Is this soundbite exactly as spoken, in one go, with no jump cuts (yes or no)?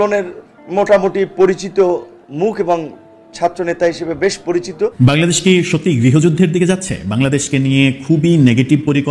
no